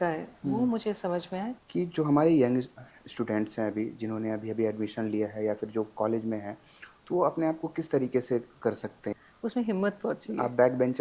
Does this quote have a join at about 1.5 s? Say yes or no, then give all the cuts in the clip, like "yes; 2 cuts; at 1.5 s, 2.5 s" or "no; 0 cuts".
yes; 2 cuts; at 1.5 s, 9.1 s